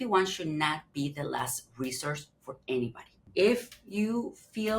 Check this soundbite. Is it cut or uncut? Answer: cut